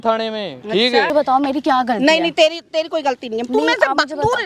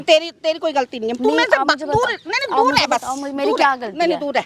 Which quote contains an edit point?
first; 1 cut; at 1.1 s

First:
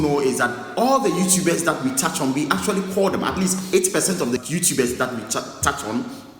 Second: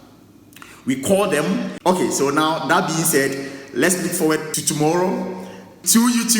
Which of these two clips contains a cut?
second; 1 cut; at 1.7 s

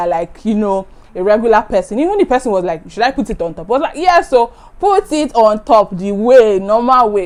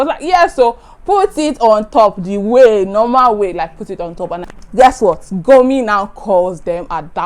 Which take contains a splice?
second; 1 cut; at 4.5 s

